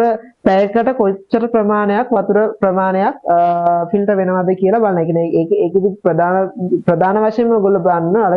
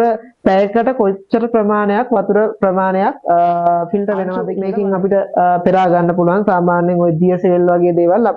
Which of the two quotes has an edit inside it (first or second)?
second